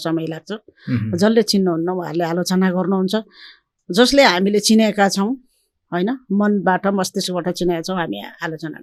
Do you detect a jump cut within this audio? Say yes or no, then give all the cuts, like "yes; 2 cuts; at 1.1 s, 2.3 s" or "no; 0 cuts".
no; 0 cuts